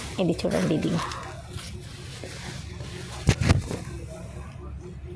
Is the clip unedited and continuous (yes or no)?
yes